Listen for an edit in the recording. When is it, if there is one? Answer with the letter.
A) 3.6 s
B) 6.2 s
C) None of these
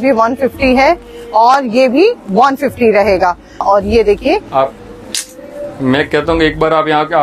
A